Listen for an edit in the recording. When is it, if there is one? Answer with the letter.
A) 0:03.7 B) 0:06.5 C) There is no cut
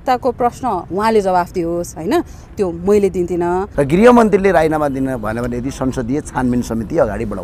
A